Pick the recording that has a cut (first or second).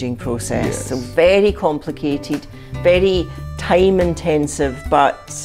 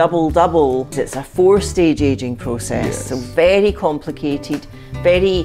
second